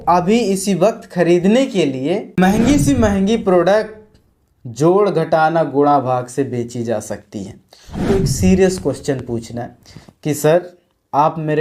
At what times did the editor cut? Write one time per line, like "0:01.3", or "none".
0:02.4
0:08.0